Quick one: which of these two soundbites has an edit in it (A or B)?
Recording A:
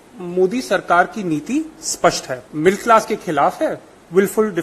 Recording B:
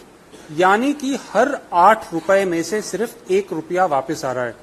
A